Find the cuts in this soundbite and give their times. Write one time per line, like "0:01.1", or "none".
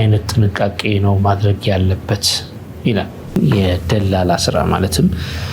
0:03.4

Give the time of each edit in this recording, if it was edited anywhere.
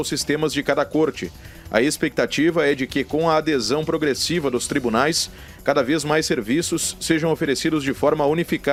none

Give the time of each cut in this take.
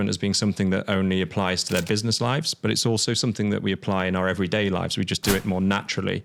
none

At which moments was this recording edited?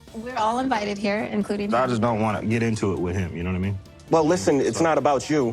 0:03.9

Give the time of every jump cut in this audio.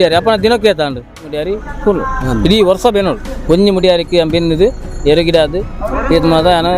0:01.4

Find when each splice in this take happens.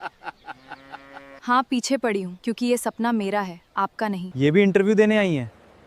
0:01.4
0:02.3
0:04.2

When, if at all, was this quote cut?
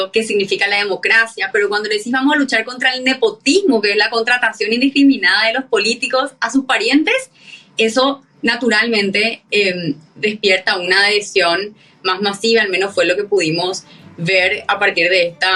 none

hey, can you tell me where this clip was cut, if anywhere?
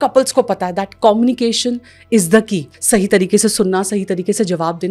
none

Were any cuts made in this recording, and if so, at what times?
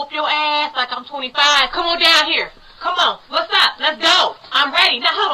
0:02.3

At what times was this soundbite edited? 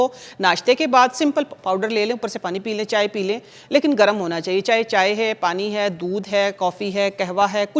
none

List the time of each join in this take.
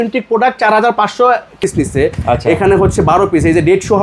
0:01.6

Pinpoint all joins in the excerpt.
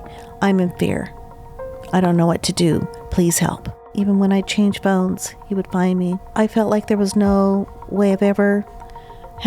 0:03.9
0:06.2

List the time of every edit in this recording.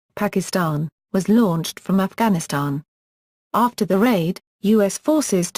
0:00.9

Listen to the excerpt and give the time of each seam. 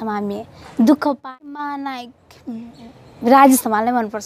0:01.2

